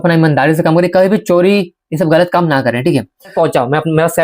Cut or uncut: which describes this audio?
cut